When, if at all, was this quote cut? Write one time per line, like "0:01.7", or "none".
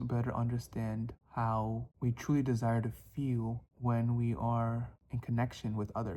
0:01.2
0:01.9
0:03.7